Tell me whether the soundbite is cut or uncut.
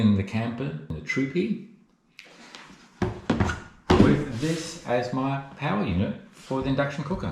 cut